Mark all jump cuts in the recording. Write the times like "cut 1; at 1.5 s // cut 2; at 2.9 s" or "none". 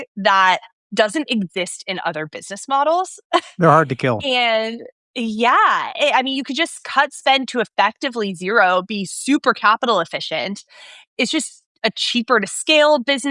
none